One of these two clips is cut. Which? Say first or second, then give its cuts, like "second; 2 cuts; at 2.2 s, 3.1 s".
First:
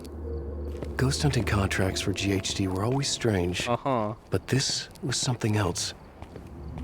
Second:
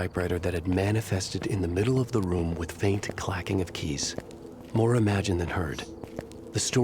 first; 1 cut; at 0.9 s